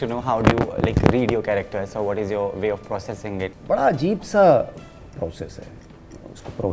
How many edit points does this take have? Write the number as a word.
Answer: one